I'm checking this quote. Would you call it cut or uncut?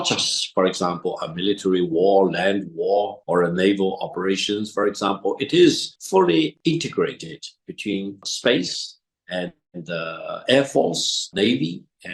uncut